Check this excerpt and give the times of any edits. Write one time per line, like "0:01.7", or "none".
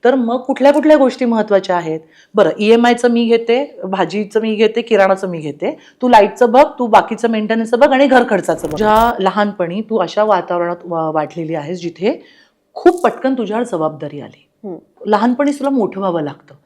0:08.7
0:15.0